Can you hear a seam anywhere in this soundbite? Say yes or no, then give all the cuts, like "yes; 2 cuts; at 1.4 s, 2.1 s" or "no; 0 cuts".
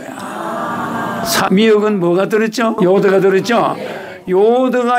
yes; 2 cuts; at 1.5 s, 2.8 s